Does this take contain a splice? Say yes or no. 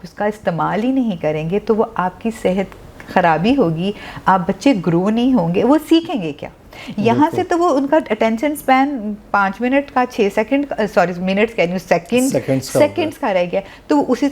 no